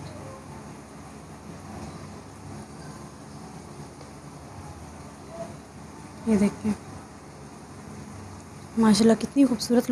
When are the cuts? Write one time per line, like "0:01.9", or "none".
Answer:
none